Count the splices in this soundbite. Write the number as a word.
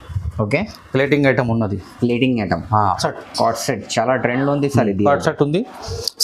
one